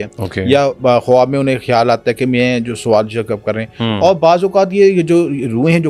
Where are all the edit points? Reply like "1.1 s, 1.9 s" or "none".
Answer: none